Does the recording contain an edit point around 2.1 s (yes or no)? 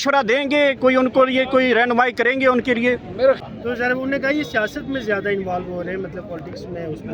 no